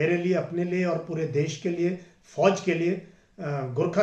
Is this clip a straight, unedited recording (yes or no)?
yes